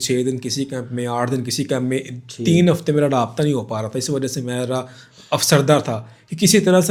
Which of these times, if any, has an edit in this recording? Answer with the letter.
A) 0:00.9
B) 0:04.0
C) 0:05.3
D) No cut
D